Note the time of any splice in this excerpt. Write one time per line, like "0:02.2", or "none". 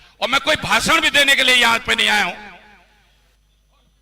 none